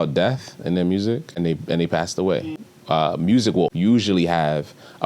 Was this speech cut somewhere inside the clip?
yes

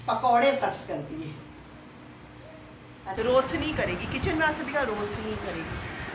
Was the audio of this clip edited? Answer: yes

